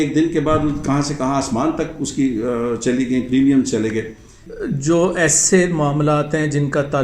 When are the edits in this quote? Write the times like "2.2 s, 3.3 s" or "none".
4.4 s